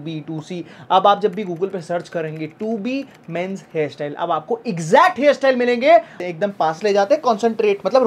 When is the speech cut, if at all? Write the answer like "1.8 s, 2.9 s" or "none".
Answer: 6.2 s